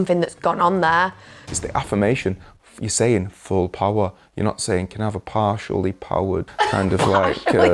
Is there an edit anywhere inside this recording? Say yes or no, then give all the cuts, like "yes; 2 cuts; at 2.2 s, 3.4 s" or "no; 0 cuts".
yes; 2 cuts; at 1.5 s, 6.5 s